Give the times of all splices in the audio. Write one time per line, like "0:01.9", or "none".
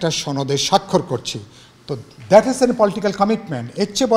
none